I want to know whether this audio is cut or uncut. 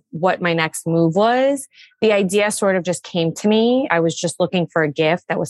cut